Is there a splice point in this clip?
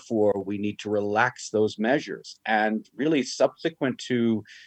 no; 0 cuts

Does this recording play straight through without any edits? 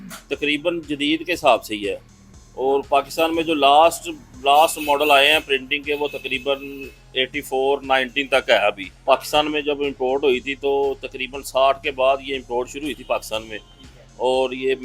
no; 1 cut; at 8.9 s

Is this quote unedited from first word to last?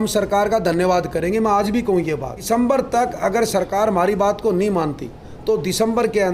no; 1 cut; at 2.4 s

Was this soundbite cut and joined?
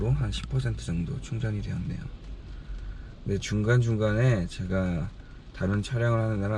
no; 0 cuts

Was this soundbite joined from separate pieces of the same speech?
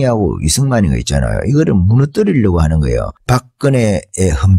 no; 0 cuts

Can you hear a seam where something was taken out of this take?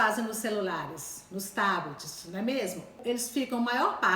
yes; 1 cut; at 3.0 s

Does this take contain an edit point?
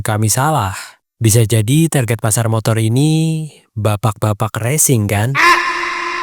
yes; 1 cut; at 5.3 s

